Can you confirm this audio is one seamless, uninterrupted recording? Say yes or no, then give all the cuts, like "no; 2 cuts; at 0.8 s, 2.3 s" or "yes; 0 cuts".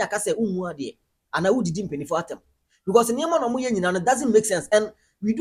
yes; 0 cuts